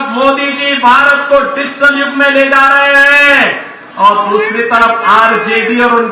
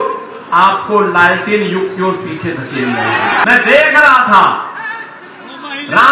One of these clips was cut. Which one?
second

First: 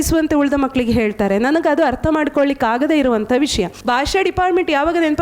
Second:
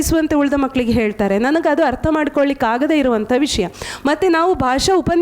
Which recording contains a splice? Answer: first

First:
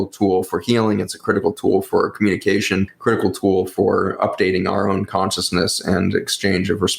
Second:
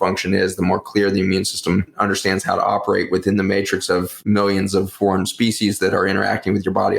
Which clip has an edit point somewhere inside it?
second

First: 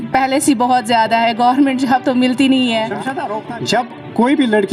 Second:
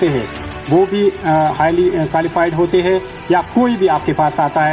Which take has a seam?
first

